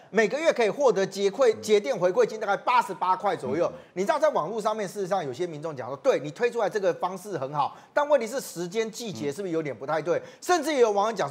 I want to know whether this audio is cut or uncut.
uncut